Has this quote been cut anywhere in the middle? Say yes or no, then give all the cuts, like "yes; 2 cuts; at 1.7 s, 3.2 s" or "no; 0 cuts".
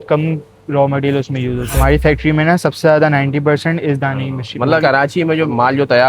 yes; 2 cuts; at 1.8 s, 4.8 s